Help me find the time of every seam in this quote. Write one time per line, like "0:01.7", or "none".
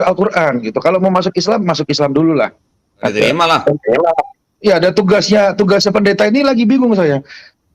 0:03.1